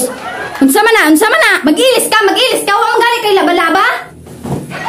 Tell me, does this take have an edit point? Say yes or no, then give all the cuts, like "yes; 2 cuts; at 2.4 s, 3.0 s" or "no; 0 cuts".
no; 0 cuts